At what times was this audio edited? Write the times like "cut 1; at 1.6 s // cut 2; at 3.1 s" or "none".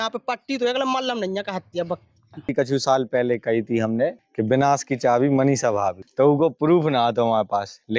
cut 1; at 2.3 s // cut 2; at 4.2 s // cut 3; at 6.0 s

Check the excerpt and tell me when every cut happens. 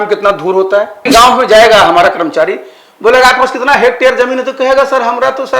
cut 1; at 1.1 s

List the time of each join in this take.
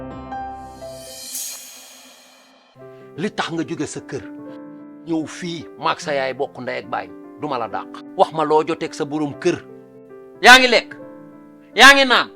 cut 1; at 2.7 s

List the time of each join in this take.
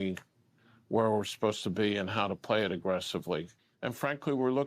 cut 1; at 3.6 s

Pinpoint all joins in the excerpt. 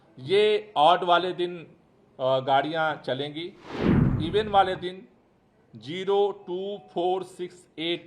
cut 1; at 4.1 s

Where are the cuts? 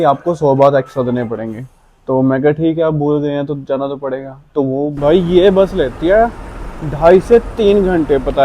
cut 1; at 5.0 s

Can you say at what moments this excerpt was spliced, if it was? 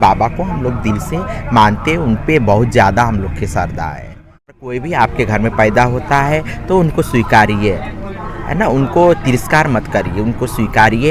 cut 1; at 4.7 s

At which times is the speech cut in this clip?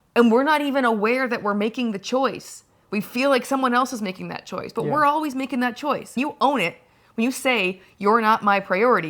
cut 1; at 6.2 s

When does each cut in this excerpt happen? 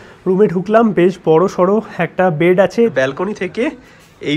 cut 1; at 2.9 s

